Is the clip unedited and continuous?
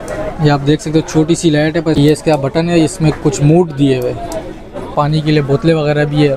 no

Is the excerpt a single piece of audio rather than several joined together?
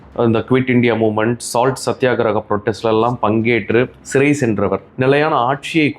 no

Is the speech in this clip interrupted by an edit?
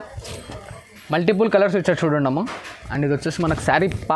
no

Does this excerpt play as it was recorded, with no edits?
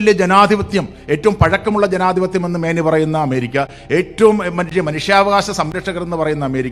yes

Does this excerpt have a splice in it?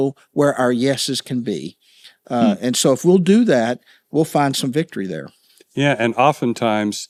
no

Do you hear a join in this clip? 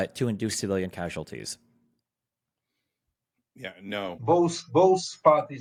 no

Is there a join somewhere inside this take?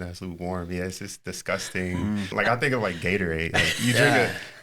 yes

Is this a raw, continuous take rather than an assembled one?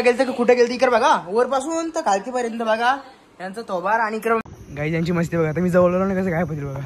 no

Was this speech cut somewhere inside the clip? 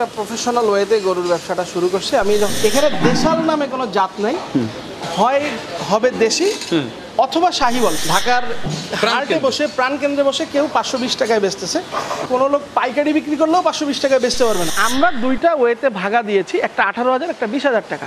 yes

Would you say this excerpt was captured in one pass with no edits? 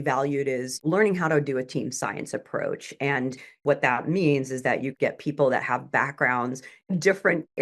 no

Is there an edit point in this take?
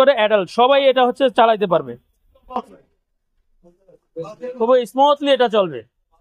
no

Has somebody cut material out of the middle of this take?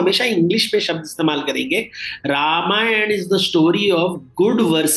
no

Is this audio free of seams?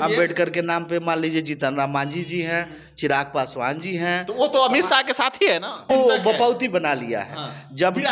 no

